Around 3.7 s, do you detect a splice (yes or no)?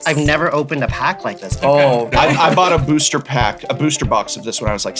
no